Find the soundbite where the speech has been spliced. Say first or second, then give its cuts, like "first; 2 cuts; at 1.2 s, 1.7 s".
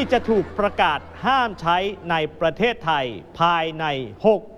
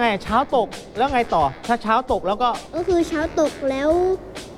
second; 1 cut; at 2.7 s